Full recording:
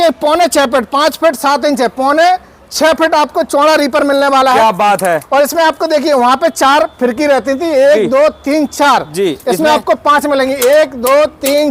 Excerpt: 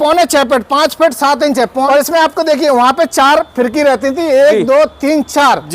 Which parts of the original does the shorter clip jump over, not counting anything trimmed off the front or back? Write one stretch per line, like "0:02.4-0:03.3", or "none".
0:02.1-0:05.3